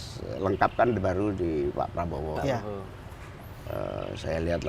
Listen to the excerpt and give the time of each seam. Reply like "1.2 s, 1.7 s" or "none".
none

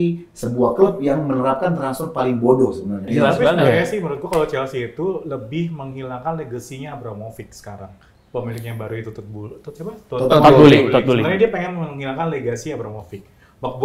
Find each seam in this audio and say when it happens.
3.1 s

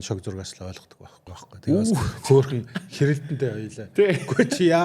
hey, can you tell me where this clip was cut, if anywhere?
1.2 s

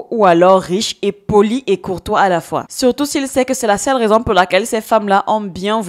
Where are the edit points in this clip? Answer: none

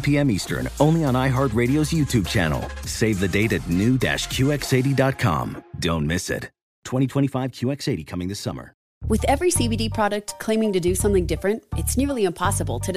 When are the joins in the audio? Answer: 8.9 s

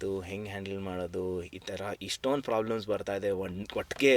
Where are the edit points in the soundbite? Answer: none

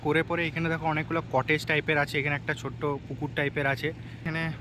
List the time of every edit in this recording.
none

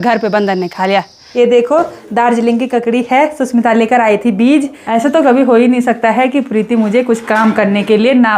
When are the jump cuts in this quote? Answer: 1.2 s, 4.8 s

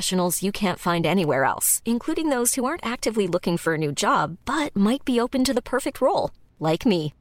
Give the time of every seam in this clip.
none

